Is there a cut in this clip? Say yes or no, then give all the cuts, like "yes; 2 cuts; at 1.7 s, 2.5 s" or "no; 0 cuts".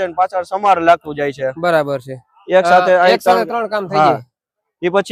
no; 0 cuts